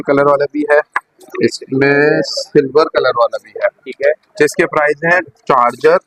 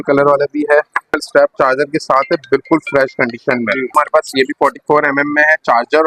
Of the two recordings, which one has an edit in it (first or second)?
second